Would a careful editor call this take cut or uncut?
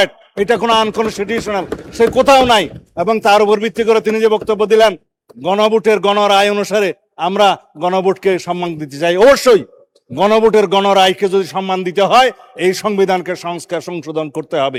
uncut